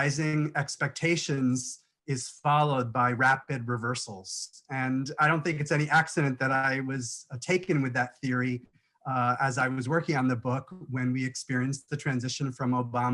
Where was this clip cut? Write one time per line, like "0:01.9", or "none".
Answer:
none